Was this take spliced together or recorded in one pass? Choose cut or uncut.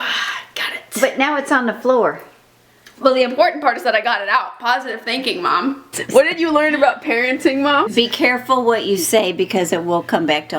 cut